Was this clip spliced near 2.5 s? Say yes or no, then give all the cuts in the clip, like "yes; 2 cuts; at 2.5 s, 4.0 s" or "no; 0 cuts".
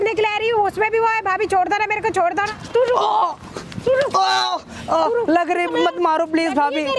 yes; 1 cut; at 2.5 s